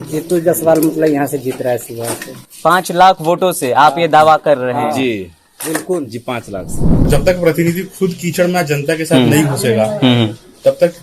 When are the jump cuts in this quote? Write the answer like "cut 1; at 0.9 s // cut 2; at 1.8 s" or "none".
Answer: cut 1; at 7.1 s